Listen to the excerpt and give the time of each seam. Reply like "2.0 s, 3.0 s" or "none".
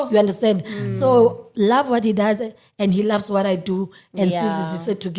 none